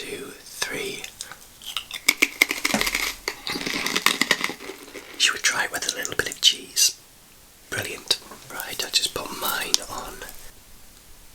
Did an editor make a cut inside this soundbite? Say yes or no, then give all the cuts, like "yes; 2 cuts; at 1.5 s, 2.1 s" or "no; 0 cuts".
yes; 3 cuts; at 4.9 s, 8.4 s, 10.5 s